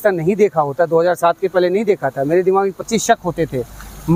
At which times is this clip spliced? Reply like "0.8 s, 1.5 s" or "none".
none